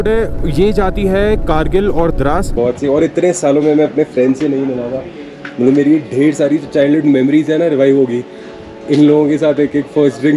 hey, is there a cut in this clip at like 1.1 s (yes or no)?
no